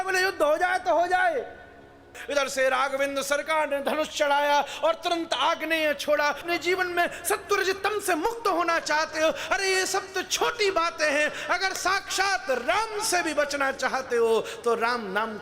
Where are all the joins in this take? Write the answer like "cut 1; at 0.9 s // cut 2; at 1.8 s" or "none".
cut 1; at 2.2 s // cut 2; at 6.4 s

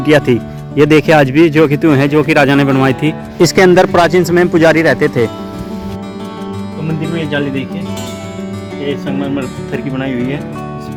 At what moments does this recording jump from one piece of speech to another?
none

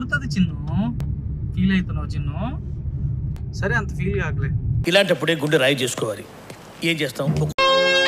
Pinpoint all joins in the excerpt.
cut 1; at 1.0 s

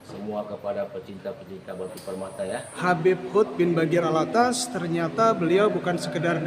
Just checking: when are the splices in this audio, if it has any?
cut 1; at 2.7 s

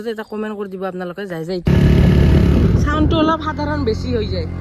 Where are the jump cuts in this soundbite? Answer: cut 1; at 1.7 s

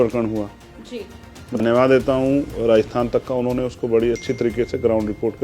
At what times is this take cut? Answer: cut 1; at 1.6 s

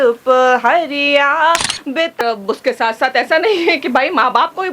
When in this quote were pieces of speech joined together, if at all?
cut 1; at 2.2 s

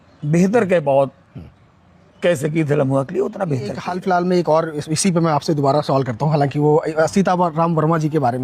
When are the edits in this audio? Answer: cut 1; at 3.8 s

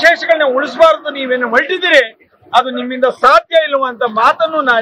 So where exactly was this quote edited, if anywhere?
none

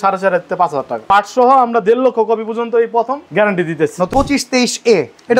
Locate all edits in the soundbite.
cut 1; at 1.1 s // cut 2; at 4.1 s

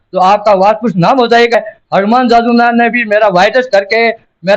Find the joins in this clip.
cut 1; at 1.5 s

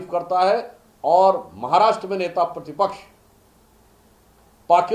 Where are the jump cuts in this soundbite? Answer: none

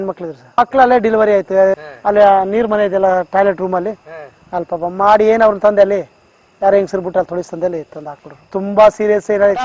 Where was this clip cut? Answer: cut 1; at 1.8 s

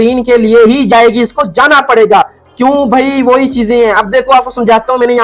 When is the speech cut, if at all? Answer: none

